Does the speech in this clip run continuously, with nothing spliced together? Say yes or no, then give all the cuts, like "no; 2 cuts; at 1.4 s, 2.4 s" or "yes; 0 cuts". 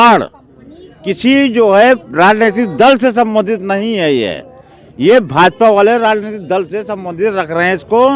yes; 0 cuts